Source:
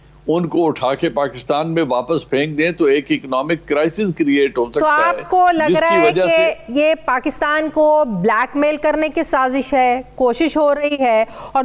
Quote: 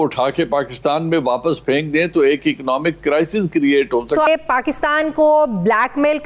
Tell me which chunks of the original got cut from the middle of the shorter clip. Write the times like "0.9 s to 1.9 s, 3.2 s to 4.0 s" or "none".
4.9 s to 6.8 s